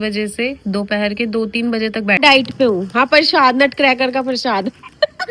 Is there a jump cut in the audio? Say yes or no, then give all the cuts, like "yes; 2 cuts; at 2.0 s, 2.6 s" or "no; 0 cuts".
yes; 1 cut; at 2.2 s